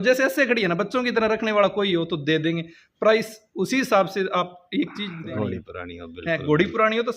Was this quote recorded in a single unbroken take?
no; 1 cut; at 5.1 s

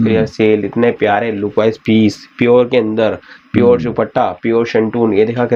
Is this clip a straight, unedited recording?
yes; 0 cuts

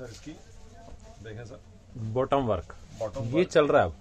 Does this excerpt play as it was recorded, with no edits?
yes; 0 cuts

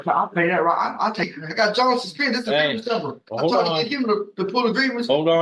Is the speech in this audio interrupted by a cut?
yes; 1 cut; at 1.3 s

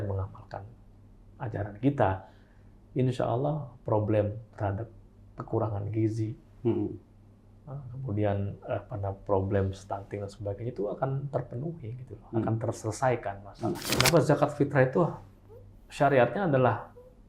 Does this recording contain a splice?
yes; 1 cut; at 13.9 s

